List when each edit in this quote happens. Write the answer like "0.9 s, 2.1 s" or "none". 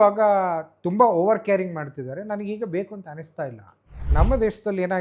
4.0 s